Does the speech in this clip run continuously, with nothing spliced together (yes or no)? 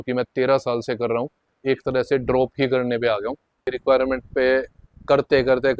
no